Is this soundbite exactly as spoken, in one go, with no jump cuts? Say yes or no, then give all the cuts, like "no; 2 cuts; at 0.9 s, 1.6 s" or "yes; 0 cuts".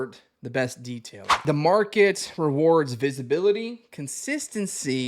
no; 1 cut; at 1.4 s